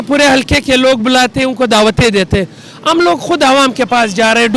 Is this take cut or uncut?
uncut